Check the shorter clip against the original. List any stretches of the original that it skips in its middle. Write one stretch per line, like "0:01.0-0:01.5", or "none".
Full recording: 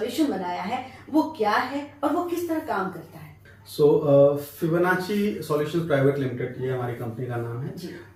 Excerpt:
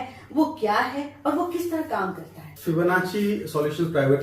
0:03.3-0:04.5